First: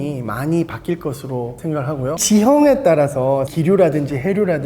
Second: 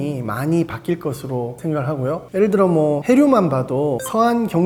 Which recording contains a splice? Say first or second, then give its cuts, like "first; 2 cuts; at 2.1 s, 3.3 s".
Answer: first; 1 cut; at 2.2 s